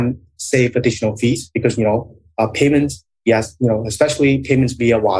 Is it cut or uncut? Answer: uncut